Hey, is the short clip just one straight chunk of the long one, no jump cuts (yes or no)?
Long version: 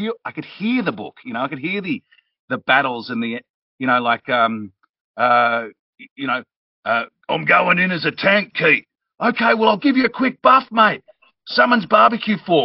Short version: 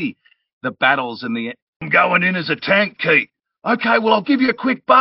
no